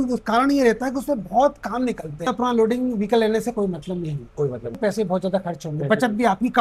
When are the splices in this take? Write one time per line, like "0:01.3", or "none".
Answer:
0:02.3
0:04.8